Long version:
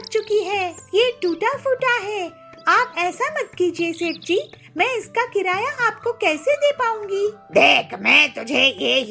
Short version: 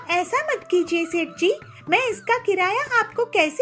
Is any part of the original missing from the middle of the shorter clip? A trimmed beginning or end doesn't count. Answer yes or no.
no